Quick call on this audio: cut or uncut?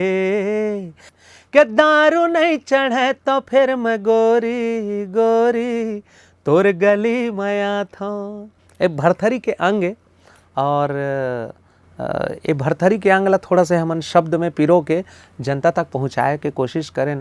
cut